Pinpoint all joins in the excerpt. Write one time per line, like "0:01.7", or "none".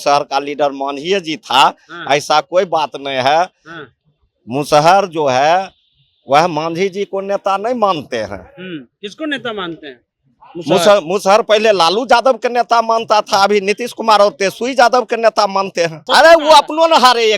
0:16.0